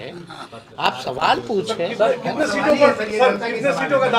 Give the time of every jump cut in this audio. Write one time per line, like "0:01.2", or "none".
none